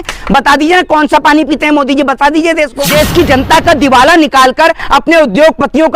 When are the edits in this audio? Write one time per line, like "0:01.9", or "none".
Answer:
0:02.8